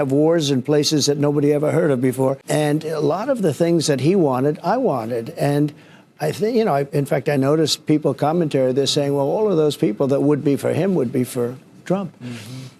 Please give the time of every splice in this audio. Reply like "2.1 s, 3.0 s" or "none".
2.4 s